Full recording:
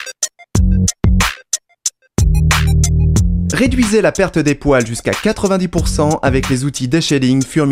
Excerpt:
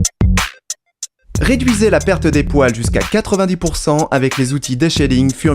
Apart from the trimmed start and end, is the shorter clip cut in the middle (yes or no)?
yes